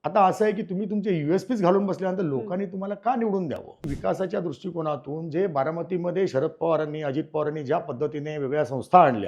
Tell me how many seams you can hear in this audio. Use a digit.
1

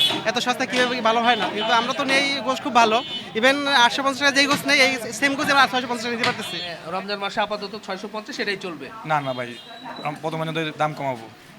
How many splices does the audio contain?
1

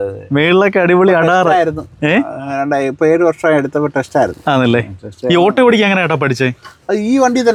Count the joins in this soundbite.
0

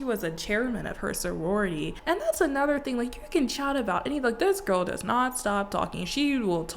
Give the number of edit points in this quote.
1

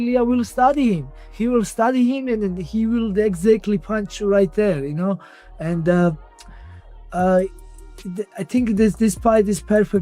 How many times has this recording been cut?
0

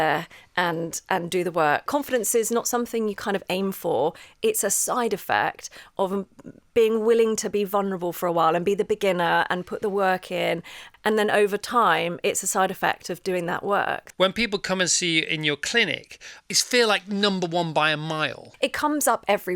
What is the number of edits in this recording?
5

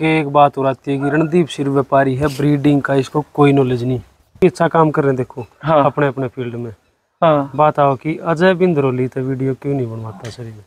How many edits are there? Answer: 1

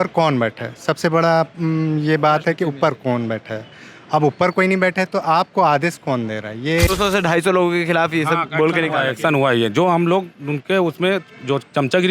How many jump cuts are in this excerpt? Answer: 1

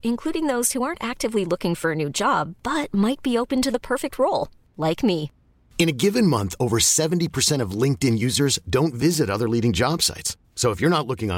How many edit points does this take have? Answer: 0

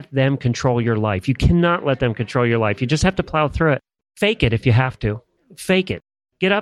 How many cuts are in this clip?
0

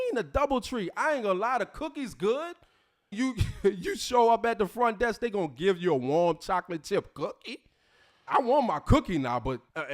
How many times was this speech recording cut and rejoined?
2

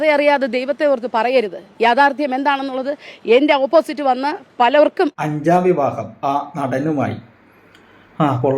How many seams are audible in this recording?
1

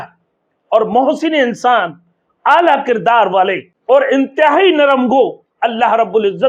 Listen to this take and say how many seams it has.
1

